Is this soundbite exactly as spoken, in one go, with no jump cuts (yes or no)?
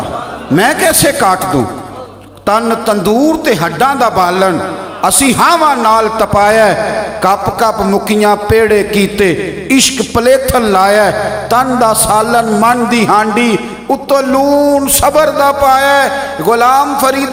yes